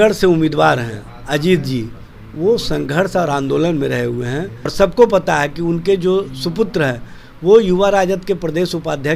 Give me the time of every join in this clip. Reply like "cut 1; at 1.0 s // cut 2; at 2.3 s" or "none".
cut 1; at 4.7 s